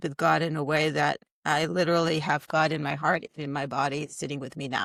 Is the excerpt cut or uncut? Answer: uncut